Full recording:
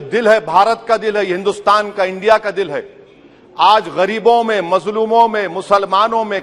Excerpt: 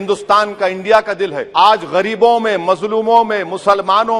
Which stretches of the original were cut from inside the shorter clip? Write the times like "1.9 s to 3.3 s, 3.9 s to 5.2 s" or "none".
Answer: 2.8 s to 3.5 s